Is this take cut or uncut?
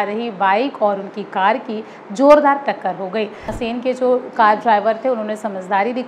cut